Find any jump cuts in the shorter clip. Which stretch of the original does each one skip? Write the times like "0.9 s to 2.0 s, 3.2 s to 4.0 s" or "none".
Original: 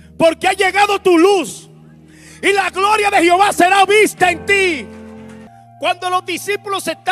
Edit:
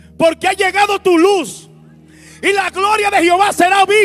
none